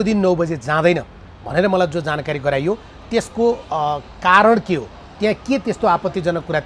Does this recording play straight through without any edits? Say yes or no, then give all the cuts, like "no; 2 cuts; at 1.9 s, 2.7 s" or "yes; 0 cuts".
yes; 0 cuts